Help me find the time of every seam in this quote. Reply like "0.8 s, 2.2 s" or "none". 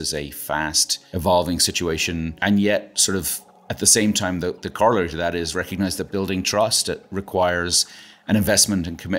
0.9 s, 2.3 s